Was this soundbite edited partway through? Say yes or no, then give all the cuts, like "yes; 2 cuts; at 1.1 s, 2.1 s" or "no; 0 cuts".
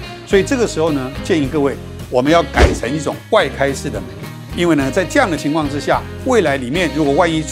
no; 0 cuts